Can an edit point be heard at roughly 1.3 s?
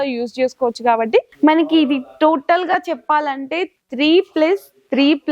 yes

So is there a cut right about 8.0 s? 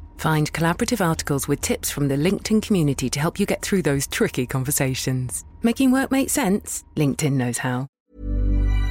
yes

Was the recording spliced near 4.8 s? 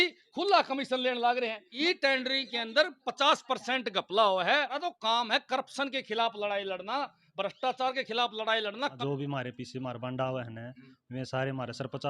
yes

